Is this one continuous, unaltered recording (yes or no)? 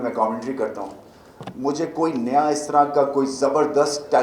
yes